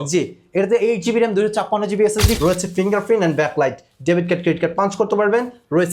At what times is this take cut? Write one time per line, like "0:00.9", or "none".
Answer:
0:02.4